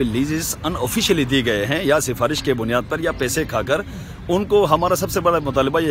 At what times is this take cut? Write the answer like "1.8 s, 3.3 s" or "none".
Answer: none